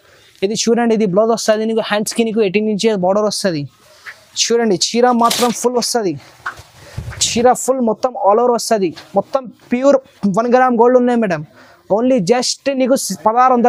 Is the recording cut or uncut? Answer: uncut